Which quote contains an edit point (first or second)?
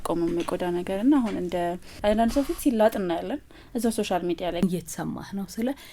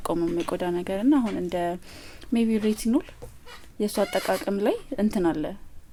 first